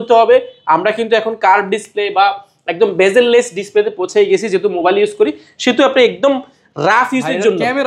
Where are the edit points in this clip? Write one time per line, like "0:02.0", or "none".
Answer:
none